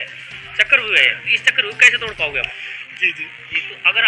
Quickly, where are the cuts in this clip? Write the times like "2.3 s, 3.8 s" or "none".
2.8 s